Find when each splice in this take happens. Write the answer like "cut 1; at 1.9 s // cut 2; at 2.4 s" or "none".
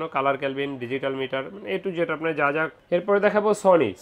cut 1; at 2.7 s